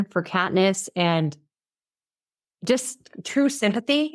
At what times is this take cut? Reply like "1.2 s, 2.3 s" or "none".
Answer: none